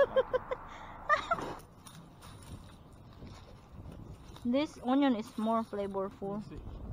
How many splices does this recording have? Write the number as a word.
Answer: one